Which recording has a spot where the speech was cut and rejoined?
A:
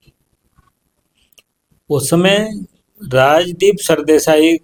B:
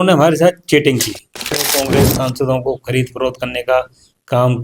B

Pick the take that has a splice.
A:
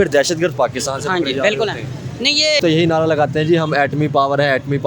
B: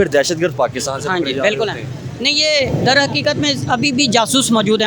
A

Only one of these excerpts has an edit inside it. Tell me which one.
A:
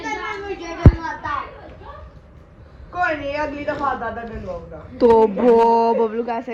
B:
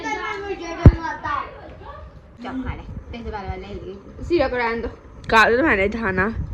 B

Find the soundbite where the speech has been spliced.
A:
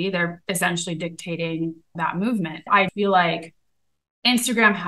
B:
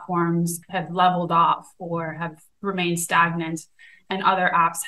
A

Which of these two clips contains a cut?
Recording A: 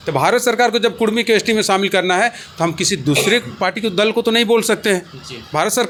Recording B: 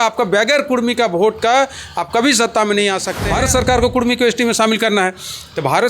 B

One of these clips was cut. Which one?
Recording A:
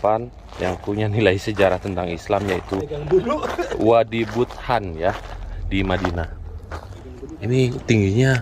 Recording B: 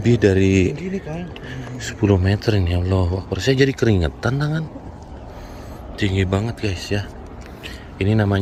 A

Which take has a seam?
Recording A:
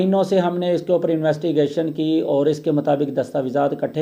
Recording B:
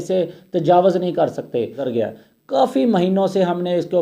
B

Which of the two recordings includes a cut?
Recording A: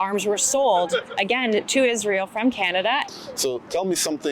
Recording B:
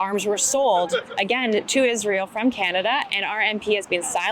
A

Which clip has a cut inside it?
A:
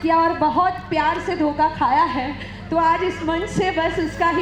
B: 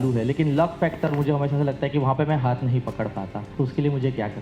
B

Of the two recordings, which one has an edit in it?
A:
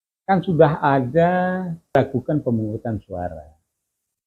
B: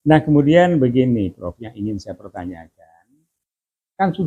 A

